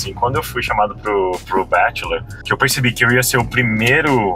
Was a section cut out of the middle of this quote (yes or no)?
yes